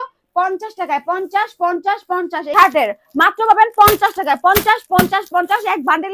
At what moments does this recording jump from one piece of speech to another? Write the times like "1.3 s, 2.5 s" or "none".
2.5 s